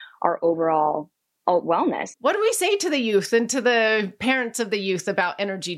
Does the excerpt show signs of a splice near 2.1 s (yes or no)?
yes